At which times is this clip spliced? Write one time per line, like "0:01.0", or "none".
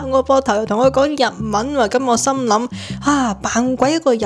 none